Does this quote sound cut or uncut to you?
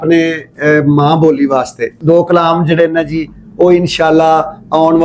cut